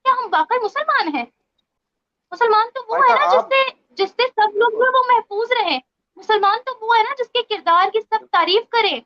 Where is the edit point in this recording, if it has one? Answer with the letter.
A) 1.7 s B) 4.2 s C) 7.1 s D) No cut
D